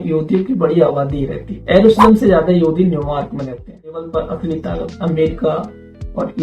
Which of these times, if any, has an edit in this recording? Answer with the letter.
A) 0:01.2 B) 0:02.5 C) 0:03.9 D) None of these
C